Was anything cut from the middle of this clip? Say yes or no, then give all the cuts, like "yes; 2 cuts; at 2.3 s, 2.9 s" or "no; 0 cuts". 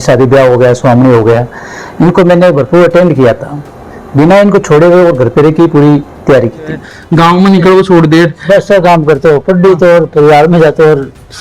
yes; 1 cut; at 6.9 s